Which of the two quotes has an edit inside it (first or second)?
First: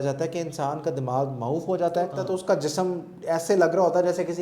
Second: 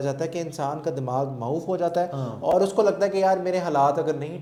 first